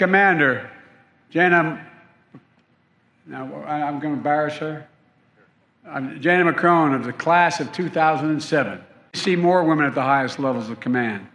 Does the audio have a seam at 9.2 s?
yes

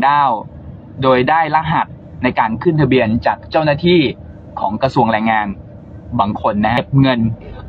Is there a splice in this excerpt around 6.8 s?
yes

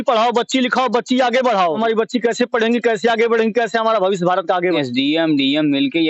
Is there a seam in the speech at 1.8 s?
yes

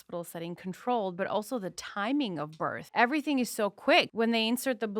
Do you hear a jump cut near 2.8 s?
yes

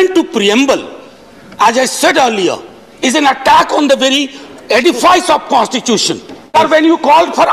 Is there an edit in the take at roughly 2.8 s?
no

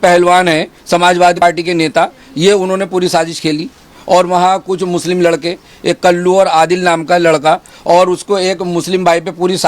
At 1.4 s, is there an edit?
yes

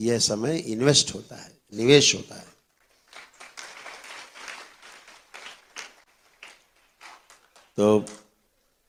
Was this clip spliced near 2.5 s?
no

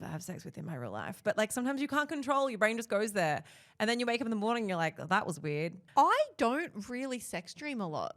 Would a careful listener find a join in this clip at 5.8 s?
yes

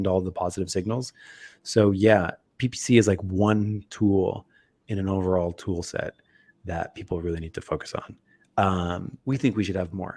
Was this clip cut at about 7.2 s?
no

